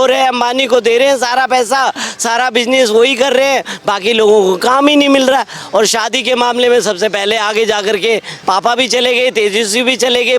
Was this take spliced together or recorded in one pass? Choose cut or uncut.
cut